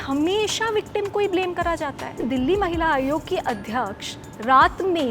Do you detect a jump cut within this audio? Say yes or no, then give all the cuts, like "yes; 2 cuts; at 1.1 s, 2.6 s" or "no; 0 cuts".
yes; 1 cut; at 2.2 s